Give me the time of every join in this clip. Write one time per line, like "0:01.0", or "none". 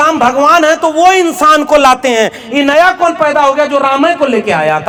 none